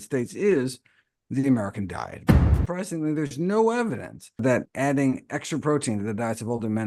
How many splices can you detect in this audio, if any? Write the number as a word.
two